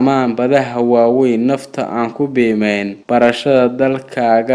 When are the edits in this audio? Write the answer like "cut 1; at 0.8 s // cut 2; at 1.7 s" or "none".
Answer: none